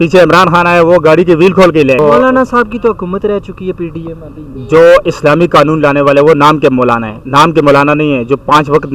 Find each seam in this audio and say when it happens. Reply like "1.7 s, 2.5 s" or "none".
2.0 s